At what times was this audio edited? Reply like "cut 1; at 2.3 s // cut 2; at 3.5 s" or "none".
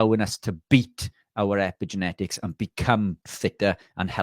cut 1; at 3.3 s